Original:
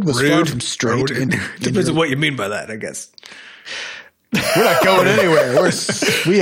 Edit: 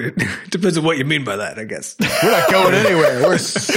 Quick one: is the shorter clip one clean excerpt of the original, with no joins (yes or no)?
no